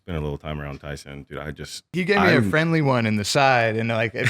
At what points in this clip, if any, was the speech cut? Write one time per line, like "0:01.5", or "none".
0:01.9